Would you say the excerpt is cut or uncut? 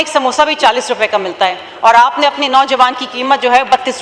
uncut